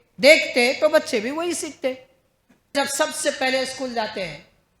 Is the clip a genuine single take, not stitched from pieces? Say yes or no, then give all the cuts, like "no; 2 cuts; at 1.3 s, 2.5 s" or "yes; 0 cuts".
no; 1 cut; at 2.7 s